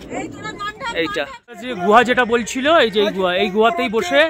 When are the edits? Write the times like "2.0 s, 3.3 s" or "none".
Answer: 1.7 s